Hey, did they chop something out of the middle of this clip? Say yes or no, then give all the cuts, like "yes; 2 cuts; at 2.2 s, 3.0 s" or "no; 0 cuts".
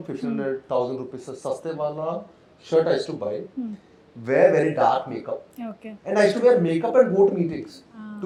no; 0 cuts